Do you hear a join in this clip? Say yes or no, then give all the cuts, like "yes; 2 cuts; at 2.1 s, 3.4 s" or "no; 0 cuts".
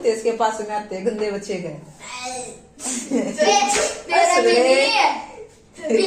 no; 0 cuts